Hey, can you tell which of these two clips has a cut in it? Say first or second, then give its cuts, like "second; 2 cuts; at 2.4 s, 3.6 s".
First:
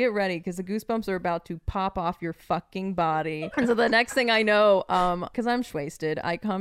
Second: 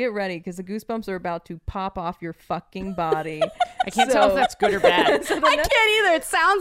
first; 2 cuts; at 3.5 s, 5.3 s